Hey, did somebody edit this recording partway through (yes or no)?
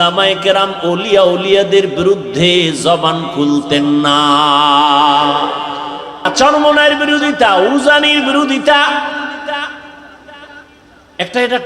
yes